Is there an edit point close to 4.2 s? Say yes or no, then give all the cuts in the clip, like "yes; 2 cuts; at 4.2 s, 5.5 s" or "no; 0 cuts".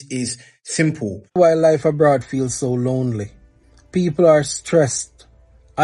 no; 1 cut; at 1.4 s